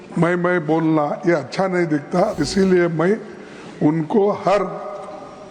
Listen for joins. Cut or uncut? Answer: cut